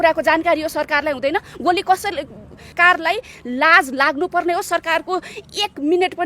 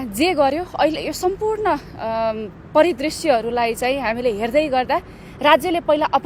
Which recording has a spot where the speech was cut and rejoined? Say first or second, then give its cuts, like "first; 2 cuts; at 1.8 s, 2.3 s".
first; 1 cut; at 2.7 s